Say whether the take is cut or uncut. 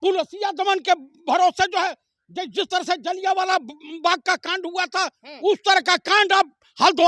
uncut